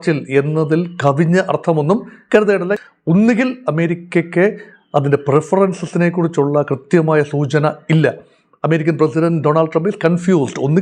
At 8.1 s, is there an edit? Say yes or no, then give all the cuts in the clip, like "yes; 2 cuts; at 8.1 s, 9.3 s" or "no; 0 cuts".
no; 1 cut; at 2.8 s